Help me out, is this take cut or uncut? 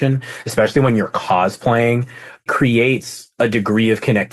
cut